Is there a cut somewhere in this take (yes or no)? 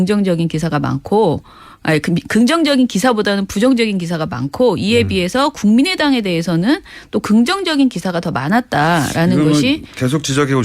yes